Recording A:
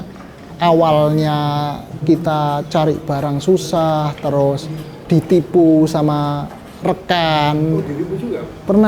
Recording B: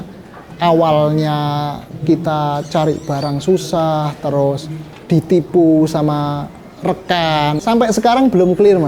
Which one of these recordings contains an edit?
B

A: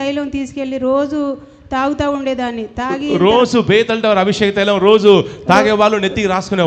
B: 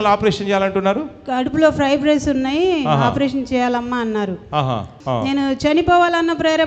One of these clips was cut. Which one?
B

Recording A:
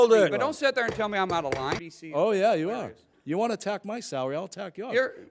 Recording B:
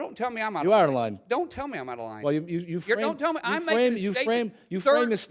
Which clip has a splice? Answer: A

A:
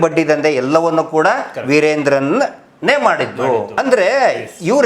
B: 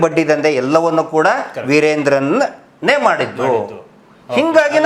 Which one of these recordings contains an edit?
A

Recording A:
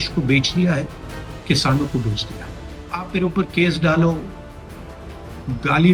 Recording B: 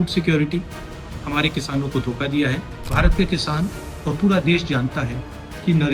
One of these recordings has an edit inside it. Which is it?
B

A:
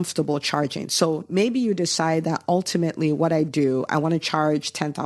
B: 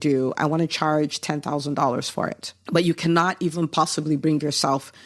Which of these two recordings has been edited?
B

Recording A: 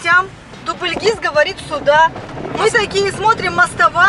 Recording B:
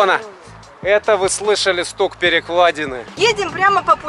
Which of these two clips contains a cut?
B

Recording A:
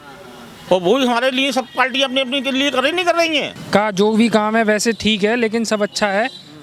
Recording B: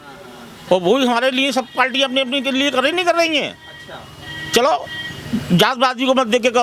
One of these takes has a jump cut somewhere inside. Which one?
A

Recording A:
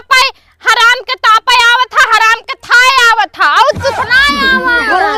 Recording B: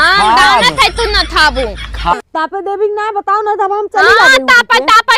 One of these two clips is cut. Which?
B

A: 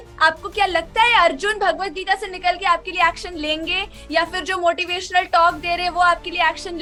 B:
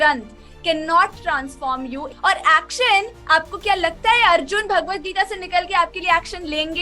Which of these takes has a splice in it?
B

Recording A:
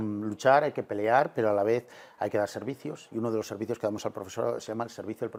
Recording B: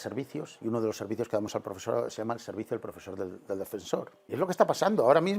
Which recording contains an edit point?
B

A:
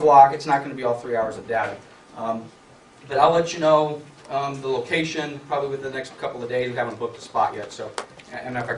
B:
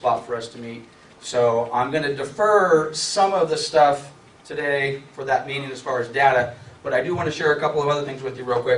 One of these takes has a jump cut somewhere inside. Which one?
B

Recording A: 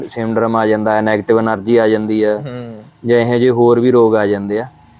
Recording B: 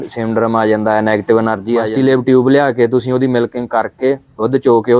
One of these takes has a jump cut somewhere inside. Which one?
B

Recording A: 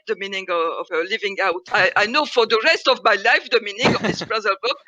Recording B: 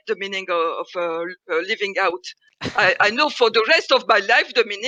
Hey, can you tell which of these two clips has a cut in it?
A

